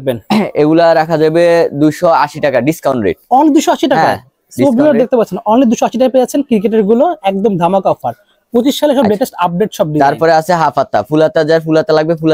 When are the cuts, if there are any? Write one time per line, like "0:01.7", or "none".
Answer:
none